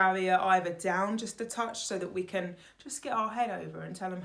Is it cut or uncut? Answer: uncut